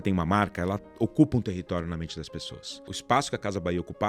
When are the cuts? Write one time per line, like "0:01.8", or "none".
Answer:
0:02.9